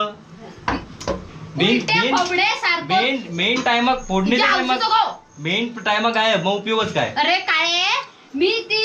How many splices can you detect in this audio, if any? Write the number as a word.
zero